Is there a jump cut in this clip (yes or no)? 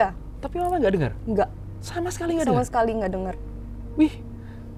no